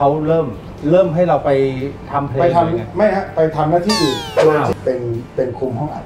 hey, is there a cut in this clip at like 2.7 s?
no; 1 cut; at 4.7 s

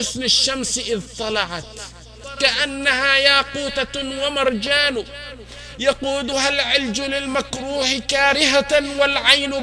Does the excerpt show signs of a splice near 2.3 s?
yes; 1 cut; at 2.3 s

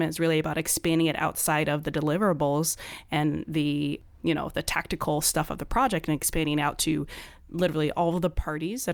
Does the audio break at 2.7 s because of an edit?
no; 0 cuts

